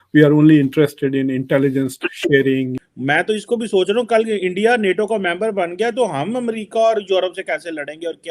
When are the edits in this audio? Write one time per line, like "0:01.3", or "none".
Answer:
0:02.8